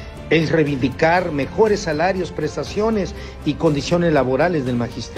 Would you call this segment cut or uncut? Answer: cut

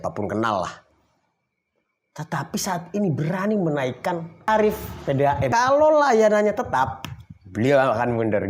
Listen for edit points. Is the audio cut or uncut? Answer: cut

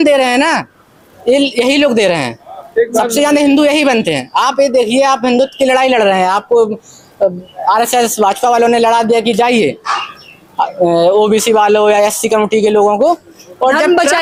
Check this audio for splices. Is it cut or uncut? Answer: uncut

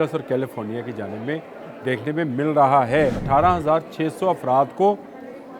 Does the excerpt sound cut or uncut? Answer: cut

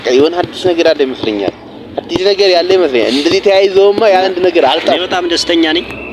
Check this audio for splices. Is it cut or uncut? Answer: cut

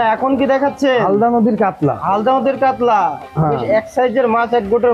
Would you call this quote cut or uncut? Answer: uncut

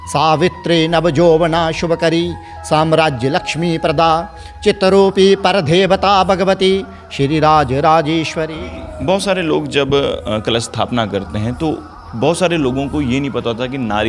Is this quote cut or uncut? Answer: cut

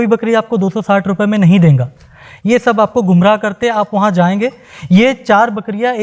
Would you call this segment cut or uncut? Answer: uncut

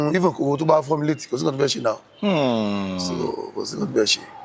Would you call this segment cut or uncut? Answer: uncut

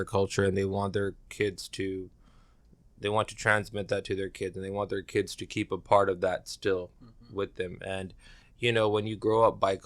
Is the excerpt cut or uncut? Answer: uncut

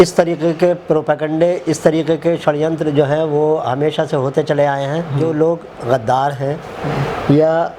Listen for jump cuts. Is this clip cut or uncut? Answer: cut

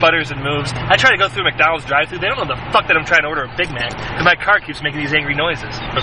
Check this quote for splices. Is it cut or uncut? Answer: uncut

